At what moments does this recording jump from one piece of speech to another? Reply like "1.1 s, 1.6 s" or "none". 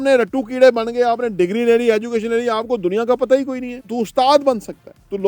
3.8 s